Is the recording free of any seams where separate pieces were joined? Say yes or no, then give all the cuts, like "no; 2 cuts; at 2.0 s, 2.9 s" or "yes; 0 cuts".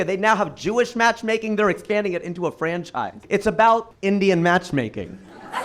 no; 2 cuts; at 3.2 s, 3.9 s